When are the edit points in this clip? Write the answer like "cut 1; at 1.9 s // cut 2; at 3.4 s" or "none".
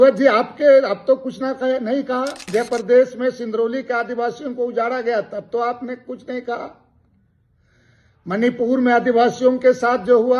cut 1; at 2.4 s